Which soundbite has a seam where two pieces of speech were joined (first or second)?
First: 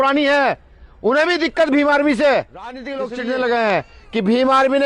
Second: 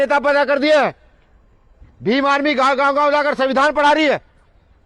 first